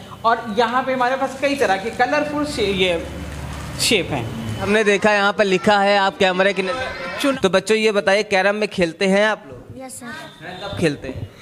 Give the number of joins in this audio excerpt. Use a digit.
2